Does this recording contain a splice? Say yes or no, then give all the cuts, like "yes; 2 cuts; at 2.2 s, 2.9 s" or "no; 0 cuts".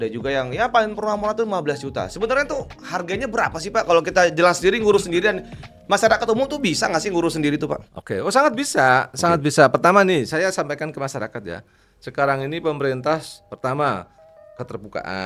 no; 0 cuts